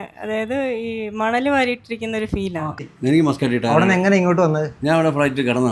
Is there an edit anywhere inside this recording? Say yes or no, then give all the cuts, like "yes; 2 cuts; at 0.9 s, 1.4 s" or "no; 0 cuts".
yes; 1 cut; at 2.8 s